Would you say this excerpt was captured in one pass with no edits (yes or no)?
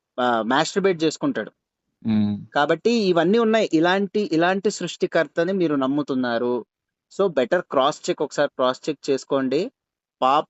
yes